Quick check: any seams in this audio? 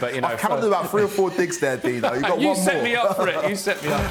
no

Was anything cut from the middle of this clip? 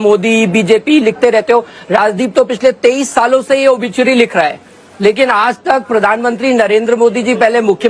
no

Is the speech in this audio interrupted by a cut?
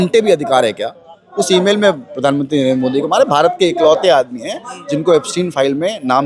yes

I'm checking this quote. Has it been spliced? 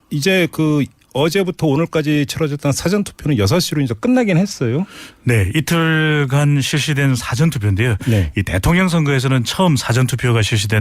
yes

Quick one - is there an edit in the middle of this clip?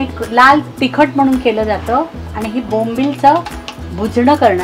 yes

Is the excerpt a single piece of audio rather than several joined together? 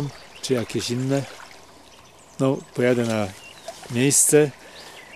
no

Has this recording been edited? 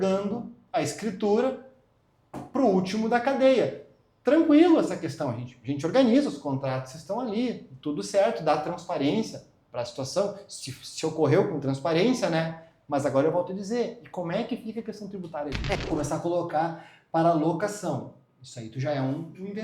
yes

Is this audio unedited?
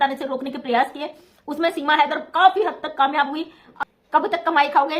no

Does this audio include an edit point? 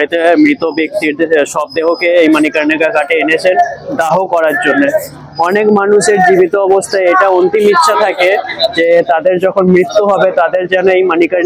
no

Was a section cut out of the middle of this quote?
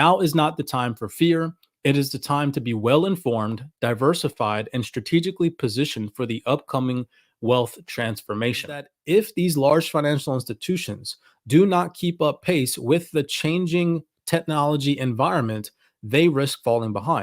yes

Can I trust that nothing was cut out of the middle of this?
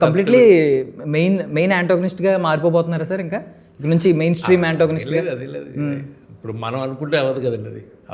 yes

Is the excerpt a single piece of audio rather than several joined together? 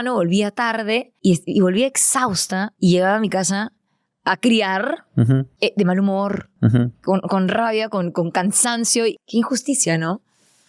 no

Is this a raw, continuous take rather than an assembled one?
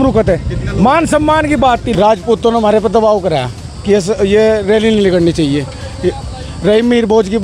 no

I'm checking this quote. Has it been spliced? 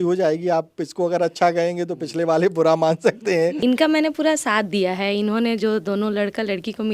yes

